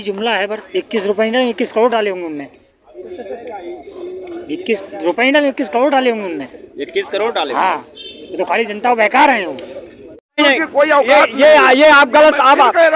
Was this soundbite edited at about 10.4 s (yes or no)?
yes